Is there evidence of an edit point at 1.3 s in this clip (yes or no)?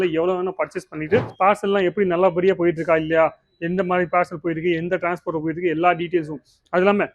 yes